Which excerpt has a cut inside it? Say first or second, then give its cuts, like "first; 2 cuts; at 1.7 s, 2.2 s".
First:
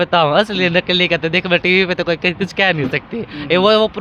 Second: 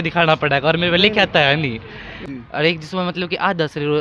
second; 1 cut; at 2.1 s